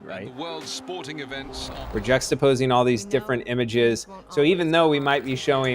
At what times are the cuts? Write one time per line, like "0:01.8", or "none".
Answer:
0:01.5